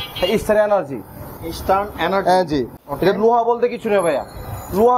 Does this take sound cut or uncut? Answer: uncut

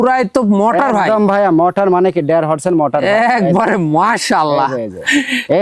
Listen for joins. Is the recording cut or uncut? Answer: uncut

